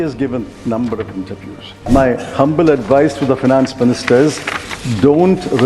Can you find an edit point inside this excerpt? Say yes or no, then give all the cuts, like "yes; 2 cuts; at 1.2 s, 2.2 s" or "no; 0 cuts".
yes; 1 cut; at 1.8 s